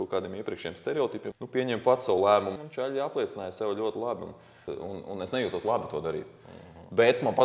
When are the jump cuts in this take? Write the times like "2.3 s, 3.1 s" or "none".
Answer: 1.3 s, 2.6 s, 4.7 s